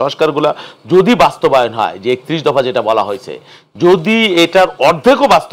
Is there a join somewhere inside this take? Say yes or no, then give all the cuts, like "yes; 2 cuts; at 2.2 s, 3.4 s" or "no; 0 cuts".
no; 0 cuts